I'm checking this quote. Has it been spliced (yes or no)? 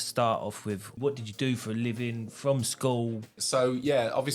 yes